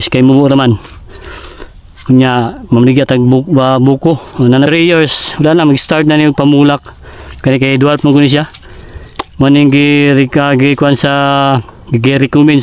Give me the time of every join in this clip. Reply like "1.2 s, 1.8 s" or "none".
4.7 s